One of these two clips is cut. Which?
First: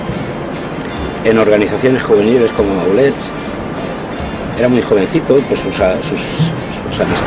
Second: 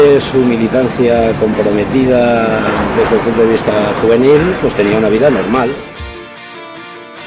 second; 1 cut; at 1.4 s

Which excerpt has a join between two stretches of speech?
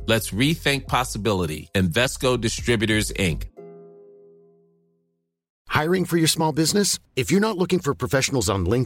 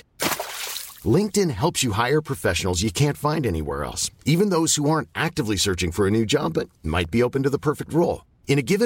first; 1 cut; at 5.5 s

